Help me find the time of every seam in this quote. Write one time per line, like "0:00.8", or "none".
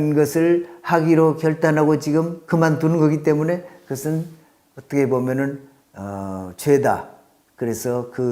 none